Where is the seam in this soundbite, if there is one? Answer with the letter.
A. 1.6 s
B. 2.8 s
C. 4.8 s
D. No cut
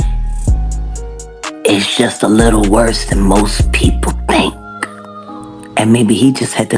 A